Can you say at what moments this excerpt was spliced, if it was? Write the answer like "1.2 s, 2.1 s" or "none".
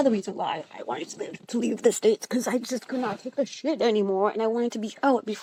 none